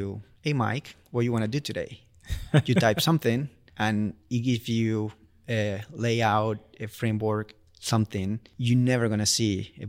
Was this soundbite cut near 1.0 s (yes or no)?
no